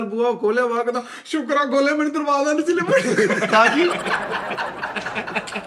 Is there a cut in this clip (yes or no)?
no